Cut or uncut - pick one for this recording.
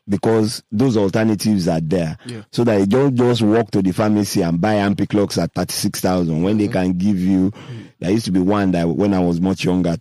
uncut